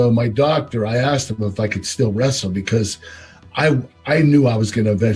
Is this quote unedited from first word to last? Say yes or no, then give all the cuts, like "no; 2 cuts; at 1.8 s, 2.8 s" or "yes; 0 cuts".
yes; 0 cuts